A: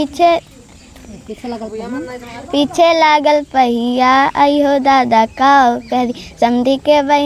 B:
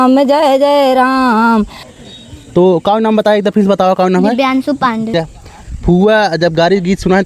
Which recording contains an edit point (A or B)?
B